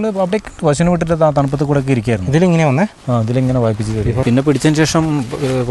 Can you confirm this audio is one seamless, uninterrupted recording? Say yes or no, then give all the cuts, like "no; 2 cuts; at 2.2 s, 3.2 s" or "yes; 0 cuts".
no; 1 cut; at 4.2 s